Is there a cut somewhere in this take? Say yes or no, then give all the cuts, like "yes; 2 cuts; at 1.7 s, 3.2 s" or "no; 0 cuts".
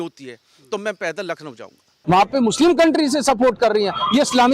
yes; 1 cut; at 1.9 s